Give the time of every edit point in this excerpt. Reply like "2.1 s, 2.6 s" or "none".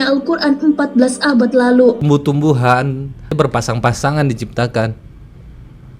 2.0 s, 3.3 s